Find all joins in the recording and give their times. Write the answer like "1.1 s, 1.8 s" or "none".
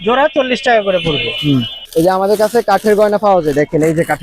1.8 s